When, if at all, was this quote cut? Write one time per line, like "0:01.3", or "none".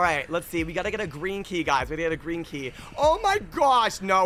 none